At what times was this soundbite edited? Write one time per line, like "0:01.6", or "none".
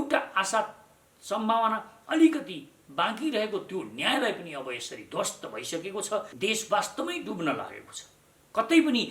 0:06.3